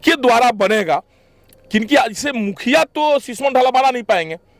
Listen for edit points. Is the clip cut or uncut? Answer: uncut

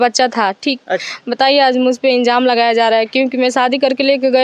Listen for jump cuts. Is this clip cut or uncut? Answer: cut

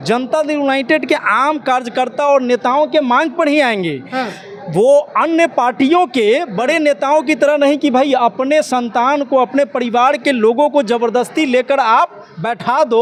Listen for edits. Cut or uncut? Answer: uncut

